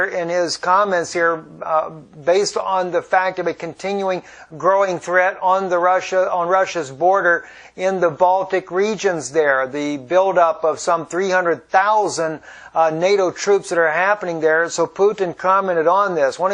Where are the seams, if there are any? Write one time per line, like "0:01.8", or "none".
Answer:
0:08.1